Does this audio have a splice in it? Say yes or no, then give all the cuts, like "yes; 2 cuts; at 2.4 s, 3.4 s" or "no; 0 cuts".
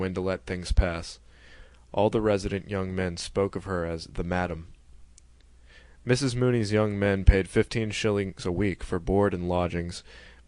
yes; 1 cut; at 3.8 s